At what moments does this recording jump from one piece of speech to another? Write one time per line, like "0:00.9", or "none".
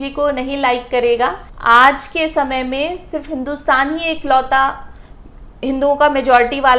0:01.5